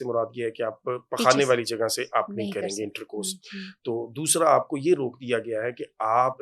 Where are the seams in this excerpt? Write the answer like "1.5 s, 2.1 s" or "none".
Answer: none